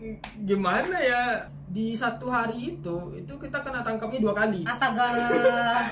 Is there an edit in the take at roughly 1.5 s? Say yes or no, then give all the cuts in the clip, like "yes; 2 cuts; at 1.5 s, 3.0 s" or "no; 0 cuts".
yes; 1 cut; at 1.5 s